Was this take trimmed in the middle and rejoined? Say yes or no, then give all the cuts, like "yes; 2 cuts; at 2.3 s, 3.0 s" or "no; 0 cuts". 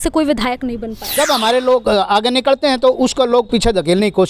yes; 1 cut; at 1.1 s